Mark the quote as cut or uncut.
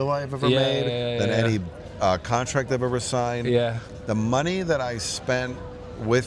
cut